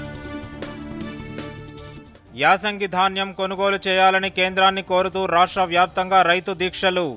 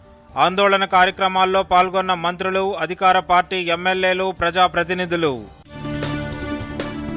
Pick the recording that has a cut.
first; 1 cut; at 2.1 s

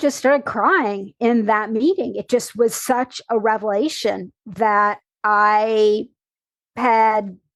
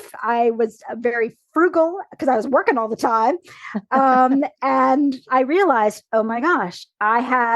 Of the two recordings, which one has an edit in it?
second; 1 cut; at 5.2 s

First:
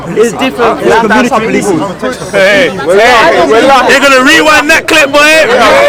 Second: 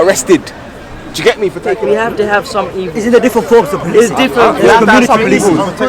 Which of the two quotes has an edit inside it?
second; 1 cut; at 1.7 s

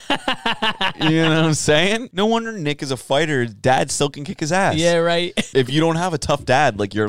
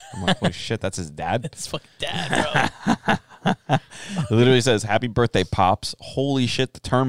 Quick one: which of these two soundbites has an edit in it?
first; 2 cuts; at 2.1 s, 5.4 s

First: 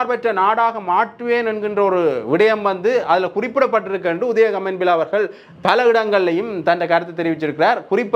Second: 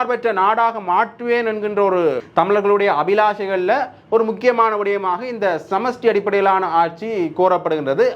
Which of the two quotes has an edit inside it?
second; 1 cut; at 2.2 s

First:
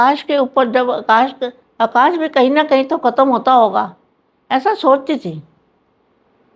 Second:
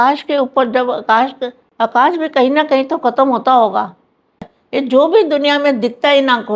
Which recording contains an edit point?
second; 1 cut; at 4.4 s

